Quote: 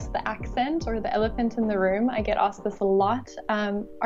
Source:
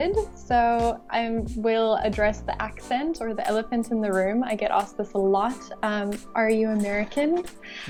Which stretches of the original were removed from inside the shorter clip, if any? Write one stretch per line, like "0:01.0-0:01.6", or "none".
none